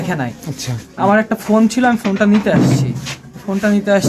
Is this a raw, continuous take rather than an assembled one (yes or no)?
yes